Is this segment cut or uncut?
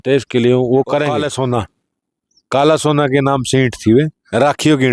cut